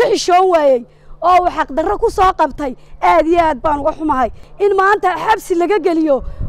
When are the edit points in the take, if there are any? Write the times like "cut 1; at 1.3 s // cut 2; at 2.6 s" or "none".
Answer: cut 1; at 4.4 s